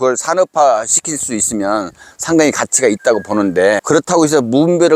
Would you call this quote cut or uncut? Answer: uncut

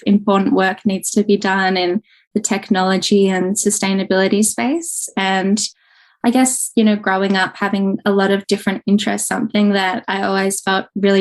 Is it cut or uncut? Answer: uncut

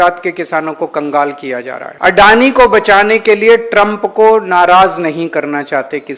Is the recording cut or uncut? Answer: cut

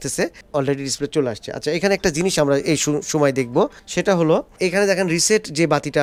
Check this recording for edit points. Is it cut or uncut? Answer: uncut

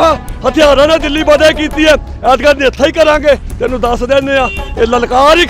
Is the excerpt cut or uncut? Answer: uncut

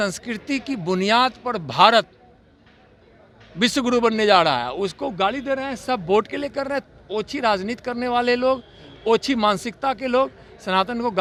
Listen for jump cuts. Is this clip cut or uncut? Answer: uncut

